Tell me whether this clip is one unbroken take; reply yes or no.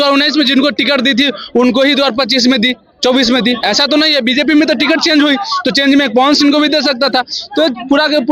yes